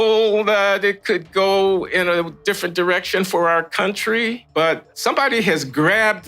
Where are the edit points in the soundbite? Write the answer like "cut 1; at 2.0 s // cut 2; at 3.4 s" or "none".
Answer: cut 1; at 4.8 s

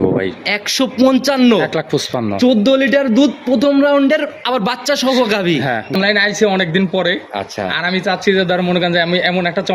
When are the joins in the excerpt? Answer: cut 1; at 5.9 s

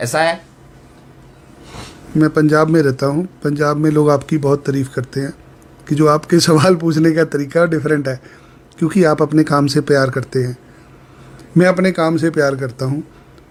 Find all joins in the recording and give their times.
none

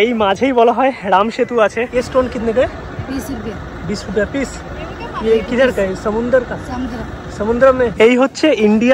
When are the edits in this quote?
cut 1; at 1.9 s // cut 2; at 7.9 s

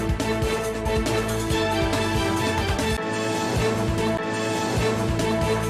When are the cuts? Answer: cut 1; at 1.4 s // cut 2; at 2.7 s

